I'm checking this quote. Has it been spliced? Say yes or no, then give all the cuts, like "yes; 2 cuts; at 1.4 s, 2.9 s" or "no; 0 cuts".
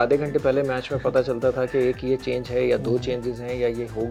no; 0 cuts